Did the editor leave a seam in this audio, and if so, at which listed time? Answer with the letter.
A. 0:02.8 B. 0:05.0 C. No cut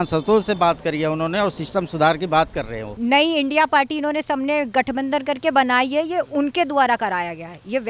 A